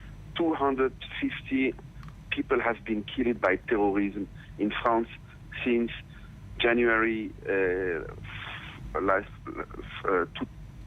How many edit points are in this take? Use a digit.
1